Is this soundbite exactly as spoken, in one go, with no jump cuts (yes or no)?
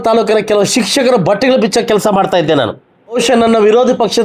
no